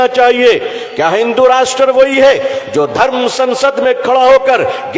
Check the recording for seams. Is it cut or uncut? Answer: uncut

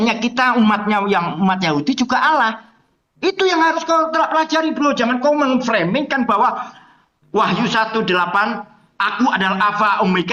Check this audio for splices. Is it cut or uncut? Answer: uncut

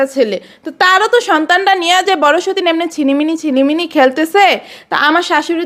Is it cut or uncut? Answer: uncut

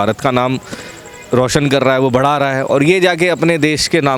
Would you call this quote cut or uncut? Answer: uncut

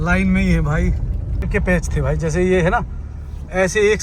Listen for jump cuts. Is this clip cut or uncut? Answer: cut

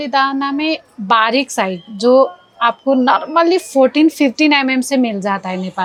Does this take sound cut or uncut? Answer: uncut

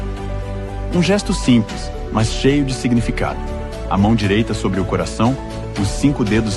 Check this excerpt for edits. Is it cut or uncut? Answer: uncut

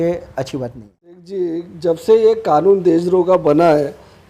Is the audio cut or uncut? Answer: cut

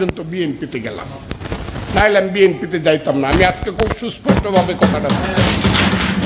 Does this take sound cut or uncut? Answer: uncut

